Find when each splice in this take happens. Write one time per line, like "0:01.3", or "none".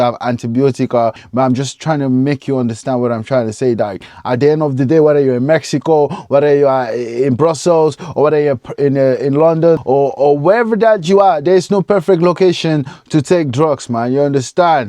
0:01.2